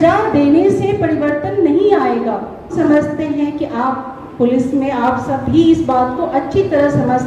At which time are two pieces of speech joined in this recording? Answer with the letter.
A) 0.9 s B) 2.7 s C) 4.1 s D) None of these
B